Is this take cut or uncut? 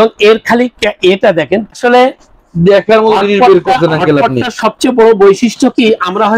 cut